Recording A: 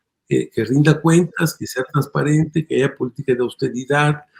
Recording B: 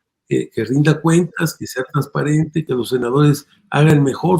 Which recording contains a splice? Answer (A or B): B